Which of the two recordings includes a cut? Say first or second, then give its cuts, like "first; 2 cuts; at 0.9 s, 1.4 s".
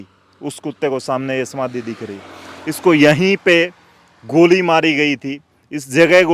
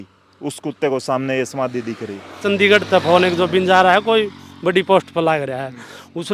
second; 1 cut; at 2.4 s